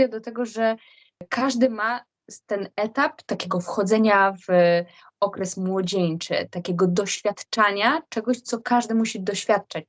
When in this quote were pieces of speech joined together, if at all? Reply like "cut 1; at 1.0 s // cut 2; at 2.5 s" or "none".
cut 1; at 1.3 s // cut 2; at 3.2 s